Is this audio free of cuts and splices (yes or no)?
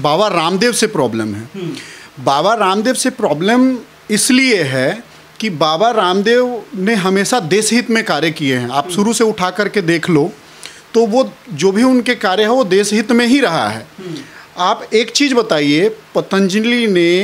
yes